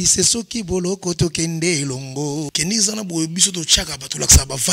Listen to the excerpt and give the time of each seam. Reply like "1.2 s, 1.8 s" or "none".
2.5 s